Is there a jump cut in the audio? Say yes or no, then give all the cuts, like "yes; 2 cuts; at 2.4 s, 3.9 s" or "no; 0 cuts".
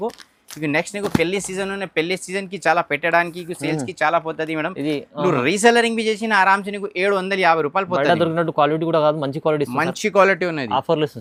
no; 0 cuts